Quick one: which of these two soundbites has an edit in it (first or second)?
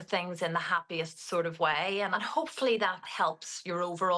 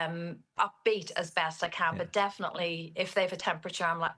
first